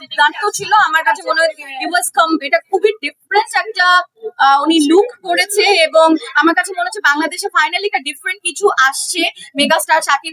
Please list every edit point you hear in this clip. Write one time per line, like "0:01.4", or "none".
none

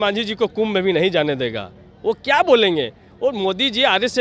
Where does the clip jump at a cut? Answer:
none

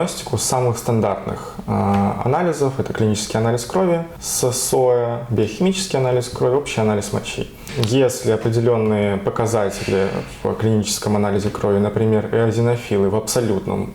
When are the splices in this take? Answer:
none

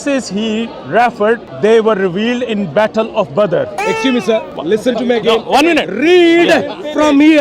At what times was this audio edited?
0:01.5
0:04.5

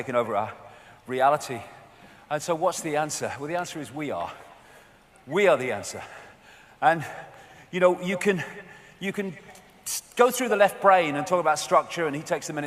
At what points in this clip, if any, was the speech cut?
0:10.8

